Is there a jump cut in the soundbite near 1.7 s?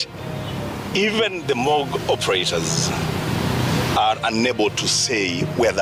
no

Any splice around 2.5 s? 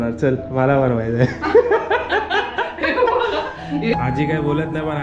no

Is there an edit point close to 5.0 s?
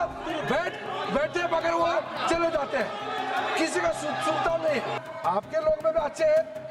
yes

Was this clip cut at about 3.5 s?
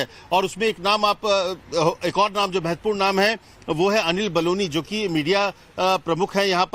no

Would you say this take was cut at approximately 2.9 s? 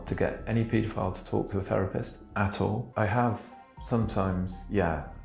yes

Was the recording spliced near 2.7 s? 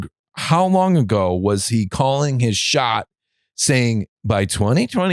no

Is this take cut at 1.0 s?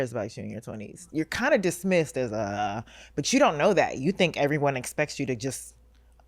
yes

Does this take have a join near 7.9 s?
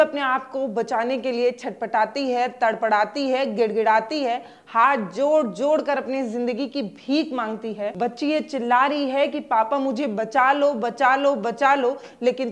yes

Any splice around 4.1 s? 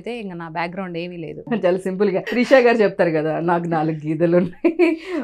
no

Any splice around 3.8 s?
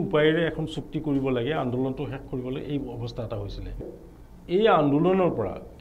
yes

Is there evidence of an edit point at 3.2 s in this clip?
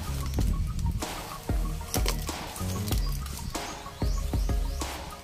no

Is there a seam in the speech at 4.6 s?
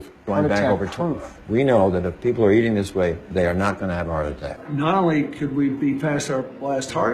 yes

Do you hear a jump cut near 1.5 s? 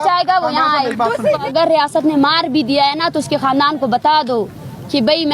yes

